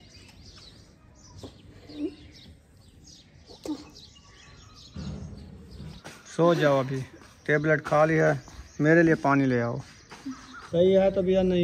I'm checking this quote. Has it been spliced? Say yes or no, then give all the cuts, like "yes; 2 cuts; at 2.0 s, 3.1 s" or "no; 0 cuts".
yes; 2 cuts; at 1.0 s, 10.5 s